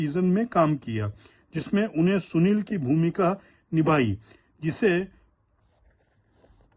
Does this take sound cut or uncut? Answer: uncut